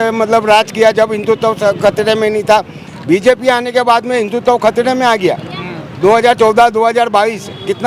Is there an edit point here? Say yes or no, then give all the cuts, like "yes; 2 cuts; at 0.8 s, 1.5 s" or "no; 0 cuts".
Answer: no; 0 cuts